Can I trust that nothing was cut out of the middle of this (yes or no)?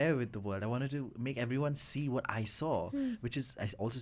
yes